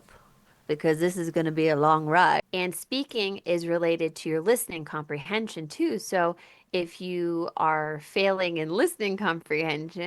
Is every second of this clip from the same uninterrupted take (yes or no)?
no